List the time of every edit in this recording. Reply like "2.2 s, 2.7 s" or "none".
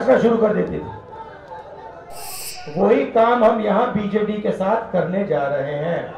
2.3 s